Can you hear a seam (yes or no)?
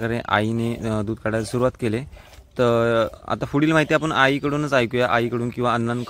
no